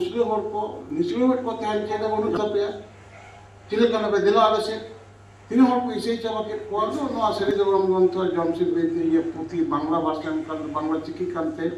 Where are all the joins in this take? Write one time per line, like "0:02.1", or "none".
0:01.9
0:07.1